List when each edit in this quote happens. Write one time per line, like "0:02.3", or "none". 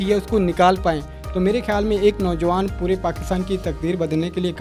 none